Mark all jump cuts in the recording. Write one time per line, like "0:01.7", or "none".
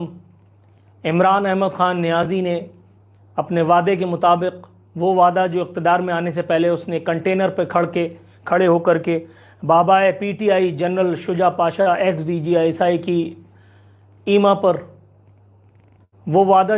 none